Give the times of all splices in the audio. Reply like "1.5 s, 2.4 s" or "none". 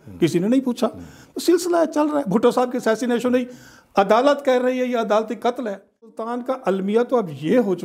6.2 s